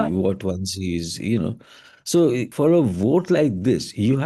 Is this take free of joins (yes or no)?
yes